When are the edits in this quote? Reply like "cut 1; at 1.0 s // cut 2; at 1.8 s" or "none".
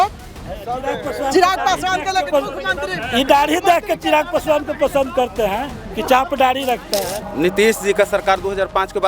cut 1; at 7.2 s